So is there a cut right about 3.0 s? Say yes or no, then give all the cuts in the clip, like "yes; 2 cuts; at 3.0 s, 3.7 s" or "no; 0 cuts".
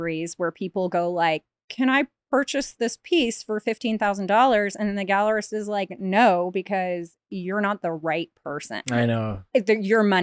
no; 1 cut; at 1.5 s